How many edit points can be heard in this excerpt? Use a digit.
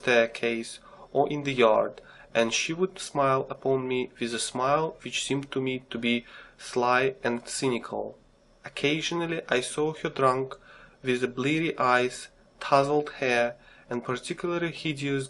1